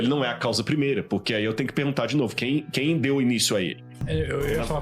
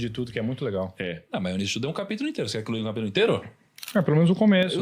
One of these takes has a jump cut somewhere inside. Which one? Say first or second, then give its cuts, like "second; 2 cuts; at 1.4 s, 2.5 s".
first; 1 cut; at 3.9 s